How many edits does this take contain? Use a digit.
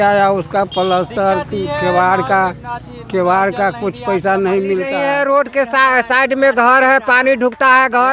1